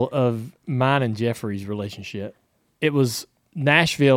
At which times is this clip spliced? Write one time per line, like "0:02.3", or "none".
0:02.4